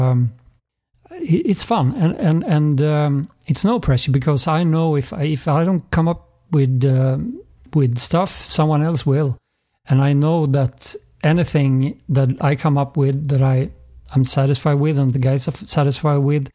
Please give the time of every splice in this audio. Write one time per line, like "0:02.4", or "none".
0:07.6